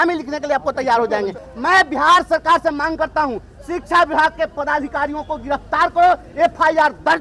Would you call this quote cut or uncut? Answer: cut